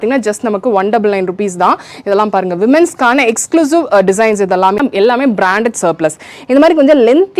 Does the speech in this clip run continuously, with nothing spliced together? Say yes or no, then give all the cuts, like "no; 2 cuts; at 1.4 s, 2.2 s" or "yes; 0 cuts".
no; 1 cut; at 4.8 s